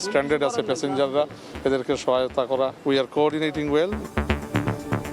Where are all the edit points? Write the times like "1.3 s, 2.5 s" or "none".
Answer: 4.0 s